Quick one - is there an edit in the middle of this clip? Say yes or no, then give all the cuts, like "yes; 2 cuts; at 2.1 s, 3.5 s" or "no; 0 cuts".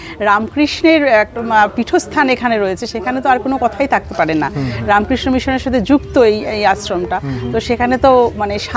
no; 0 cuts